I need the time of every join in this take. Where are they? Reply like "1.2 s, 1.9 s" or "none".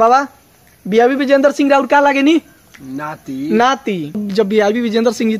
4.2 s

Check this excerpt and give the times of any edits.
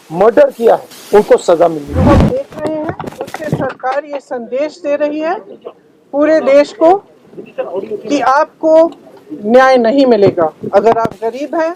0.9 s, 2.1 s

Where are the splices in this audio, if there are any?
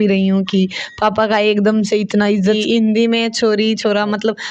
2.6 s

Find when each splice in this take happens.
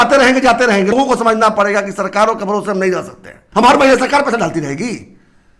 0.9 s, 3.3 s

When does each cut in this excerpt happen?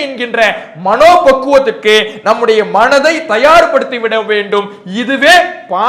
none

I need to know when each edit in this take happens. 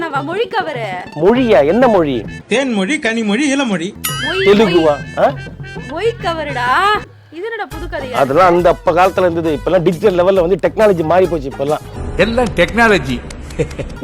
7.1 s

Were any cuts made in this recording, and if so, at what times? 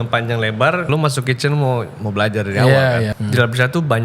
0.9 s, 3.1 s

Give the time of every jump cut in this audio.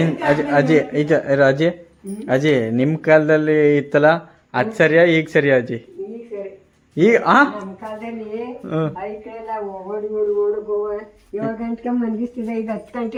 none

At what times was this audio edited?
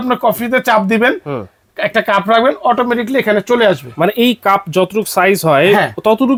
none

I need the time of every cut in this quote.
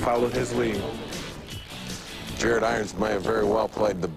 none

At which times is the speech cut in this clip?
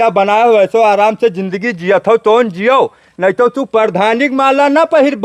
none

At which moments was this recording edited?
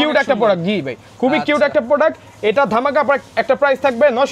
none

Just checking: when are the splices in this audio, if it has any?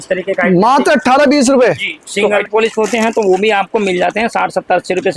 2.4 s

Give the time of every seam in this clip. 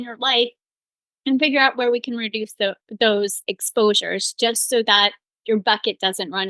none

